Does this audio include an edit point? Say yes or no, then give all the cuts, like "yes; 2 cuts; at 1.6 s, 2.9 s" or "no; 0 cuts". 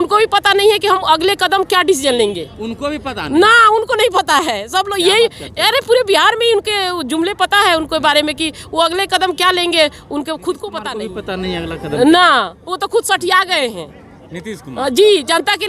yes; 1 cut; at 10.8 s